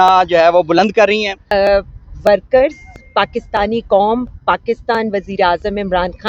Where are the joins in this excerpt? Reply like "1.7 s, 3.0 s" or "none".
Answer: 1.5 s